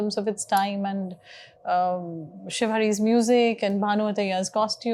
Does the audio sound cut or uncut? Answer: uncut